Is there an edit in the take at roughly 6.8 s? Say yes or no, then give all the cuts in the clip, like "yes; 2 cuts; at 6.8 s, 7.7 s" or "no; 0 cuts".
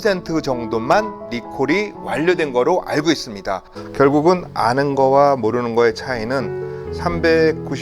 no; 1 cut; at 3.7 s